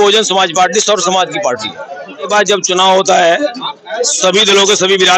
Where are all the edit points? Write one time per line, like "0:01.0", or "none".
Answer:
0:02.3